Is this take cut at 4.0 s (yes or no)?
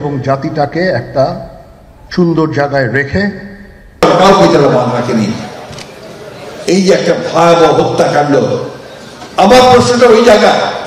yes